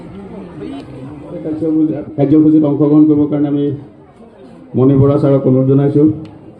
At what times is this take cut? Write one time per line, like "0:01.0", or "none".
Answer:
0:01.6